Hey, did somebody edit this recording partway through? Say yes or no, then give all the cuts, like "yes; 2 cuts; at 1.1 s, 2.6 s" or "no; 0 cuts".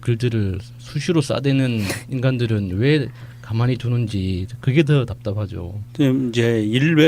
yes; 1 cut; at 1.6 s